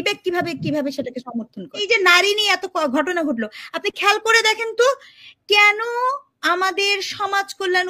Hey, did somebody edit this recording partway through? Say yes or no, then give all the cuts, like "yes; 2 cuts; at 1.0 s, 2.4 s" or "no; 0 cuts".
yes; 1 cut; at 1.8 s